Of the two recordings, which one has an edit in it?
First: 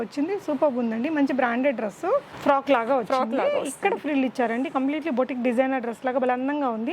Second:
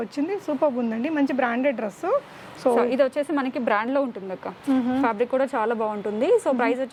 first; 1 cut; at 2.3 s

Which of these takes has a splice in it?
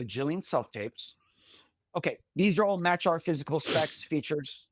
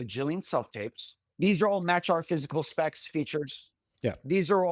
second; 1 cut; at 1.3 s

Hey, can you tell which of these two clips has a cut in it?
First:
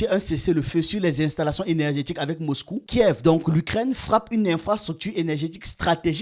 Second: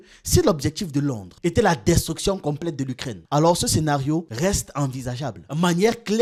first; 1 cut; at 2.7 s

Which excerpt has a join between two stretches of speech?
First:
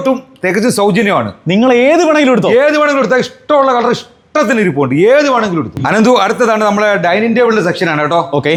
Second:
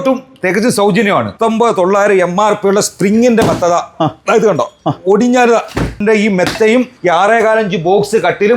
second; 3 cuts; at 1.3 s, 6.0 s, 6.9 s

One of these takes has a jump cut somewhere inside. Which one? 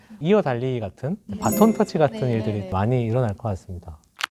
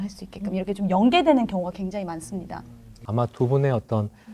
second; 1 cut; at 3.0 s

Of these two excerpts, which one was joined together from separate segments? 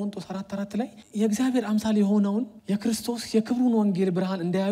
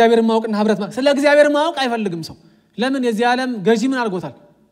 first; 2 cuts; at 1.0 s, 2.6 s

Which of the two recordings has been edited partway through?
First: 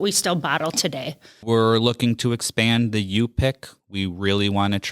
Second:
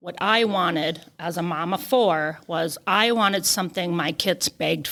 first; 1 cut; at 1.3 s

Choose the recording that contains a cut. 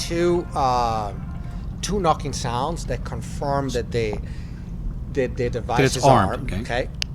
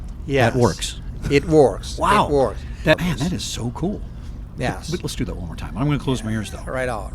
second; 1 cut; at 3.0 s

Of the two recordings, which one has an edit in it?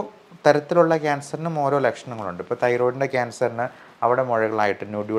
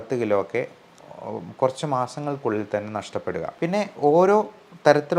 second; 1 cut; at 3.5 s

